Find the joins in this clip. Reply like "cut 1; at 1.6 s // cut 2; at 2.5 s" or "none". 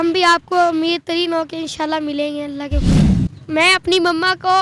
cut 1; at 2.8 s